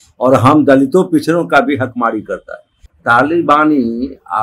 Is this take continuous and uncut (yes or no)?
no